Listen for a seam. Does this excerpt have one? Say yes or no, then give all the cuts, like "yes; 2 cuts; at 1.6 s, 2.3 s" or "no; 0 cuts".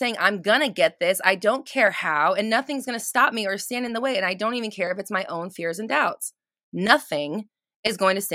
no; 0 cuts